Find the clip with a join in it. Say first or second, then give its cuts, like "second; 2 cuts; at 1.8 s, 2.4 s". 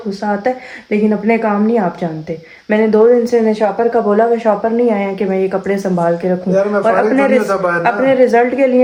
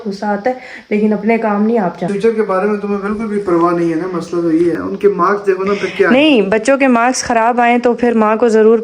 second; 2 cuts; at 2.1 s, 4.8 s